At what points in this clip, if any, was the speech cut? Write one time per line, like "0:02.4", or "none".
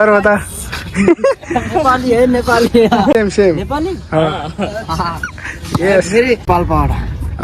0:03.1
0:06.4